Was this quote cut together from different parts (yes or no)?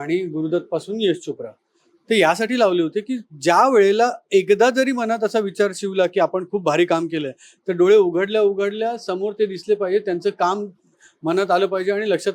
no